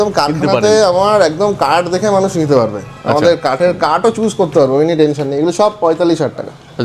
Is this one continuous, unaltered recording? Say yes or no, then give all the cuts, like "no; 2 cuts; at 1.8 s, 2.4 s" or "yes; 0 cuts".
yes; 0 cuts